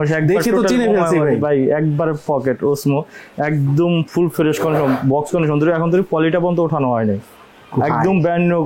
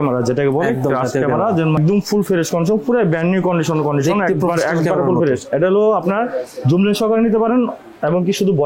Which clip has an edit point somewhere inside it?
second; 1 cut; at 1.8 s

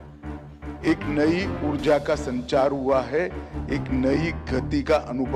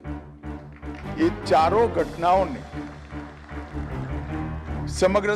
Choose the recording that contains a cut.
second; 2 cuts; at 2.6 s, 4.5 s

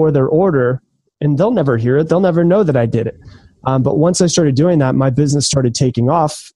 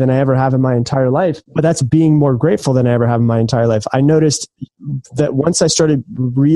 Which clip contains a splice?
second; 1 cut; at 1.4 s

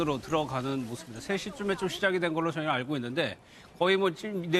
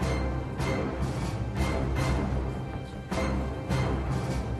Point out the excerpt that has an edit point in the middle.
first; 1 cut; at 1.2 s

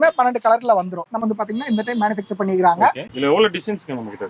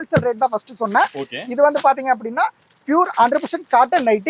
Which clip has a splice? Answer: first; 1 cut; at 1.2 s

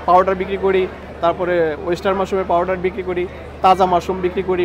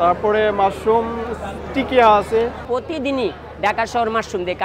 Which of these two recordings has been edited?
second; 1 cut; at 2.6 s

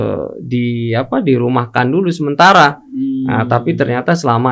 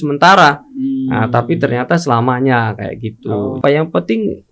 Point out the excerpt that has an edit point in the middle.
second; 1 cut; at 3.6 s

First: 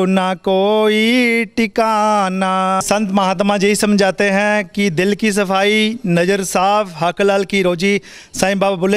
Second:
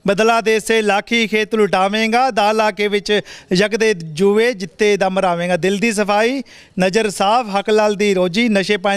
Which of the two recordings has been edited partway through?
first; 1 cut; at 2.8 s

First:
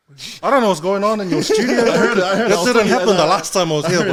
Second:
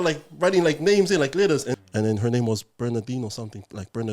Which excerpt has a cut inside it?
second; 1 cut; at 1.7 s

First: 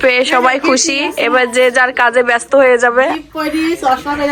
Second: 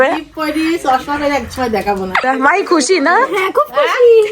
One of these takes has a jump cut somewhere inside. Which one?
second; 1 cut; at 2.2 s

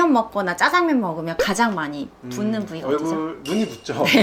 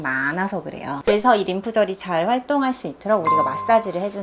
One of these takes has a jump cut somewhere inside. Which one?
second; 1 cut; at 0.9 s

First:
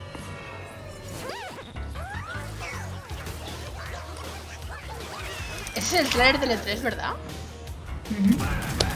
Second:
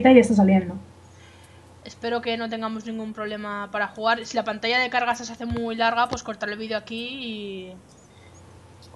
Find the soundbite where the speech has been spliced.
second; 1 cut; at 2.5 s

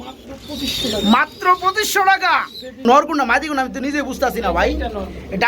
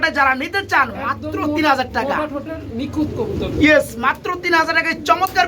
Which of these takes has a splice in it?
first; 1 cut; at 2.8 s

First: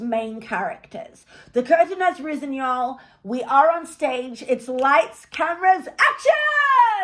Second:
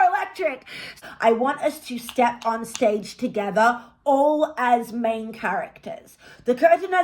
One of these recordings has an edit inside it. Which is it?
second; 1 cut; at 0.9 s

